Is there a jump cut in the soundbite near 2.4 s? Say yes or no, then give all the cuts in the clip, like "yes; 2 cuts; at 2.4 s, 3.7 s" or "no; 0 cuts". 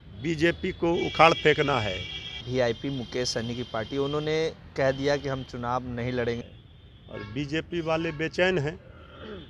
yes; 2 cuts; at 2.4 s, 6.4 s